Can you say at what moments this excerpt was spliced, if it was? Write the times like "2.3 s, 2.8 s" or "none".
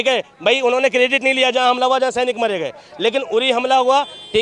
none